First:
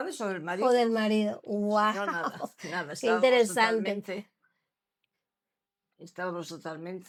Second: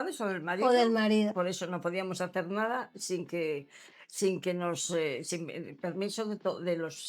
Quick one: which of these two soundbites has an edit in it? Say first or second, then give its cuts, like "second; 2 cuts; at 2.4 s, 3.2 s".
second; 1 cut; at 1.3 s